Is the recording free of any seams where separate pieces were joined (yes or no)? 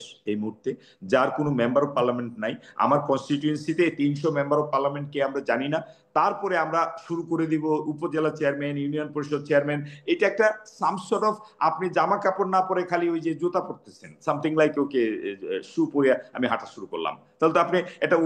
yes